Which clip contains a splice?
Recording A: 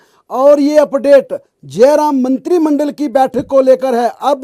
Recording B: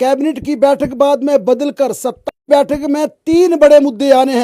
B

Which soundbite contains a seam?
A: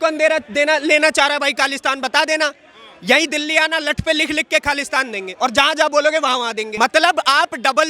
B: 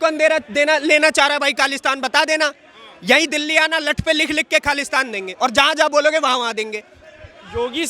A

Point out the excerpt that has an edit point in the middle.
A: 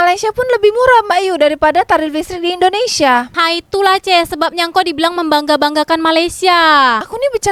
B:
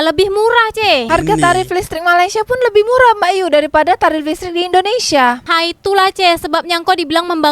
B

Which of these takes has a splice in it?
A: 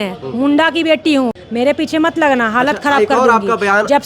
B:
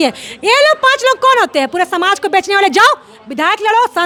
A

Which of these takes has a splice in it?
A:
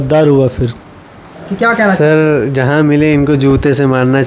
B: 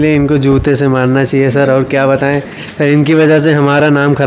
A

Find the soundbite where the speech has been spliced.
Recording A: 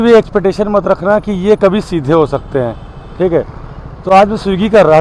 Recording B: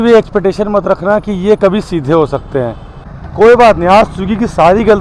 B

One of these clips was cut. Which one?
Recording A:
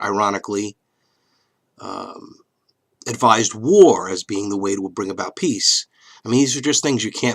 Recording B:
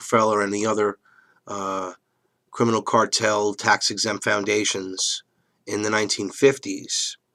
A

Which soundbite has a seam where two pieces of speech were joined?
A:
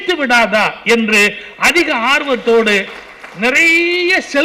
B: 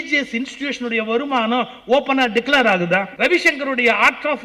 B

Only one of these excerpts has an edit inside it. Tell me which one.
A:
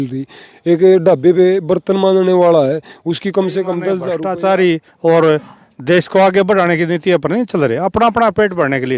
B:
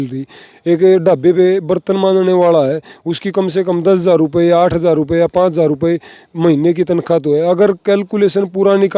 A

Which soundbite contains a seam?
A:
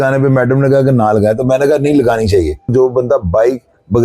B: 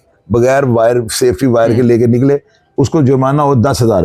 A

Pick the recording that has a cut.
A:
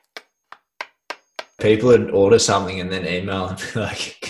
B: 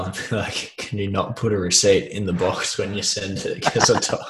A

